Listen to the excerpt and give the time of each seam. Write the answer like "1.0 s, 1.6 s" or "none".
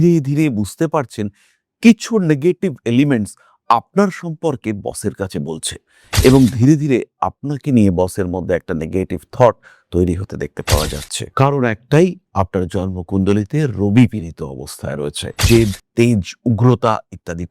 15.4 s